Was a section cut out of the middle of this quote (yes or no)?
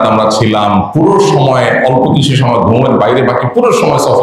no